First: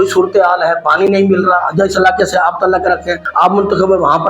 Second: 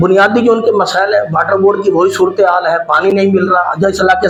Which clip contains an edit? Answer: first; 1 cut; at 3.2 s

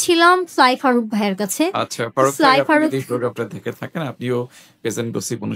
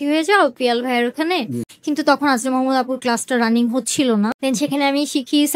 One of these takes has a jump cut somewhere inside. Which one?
second; 2 cuts; at 1.7 s, 4.4 s

